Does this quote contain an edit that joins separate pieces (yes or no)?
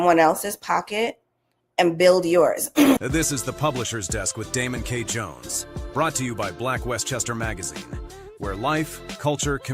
yes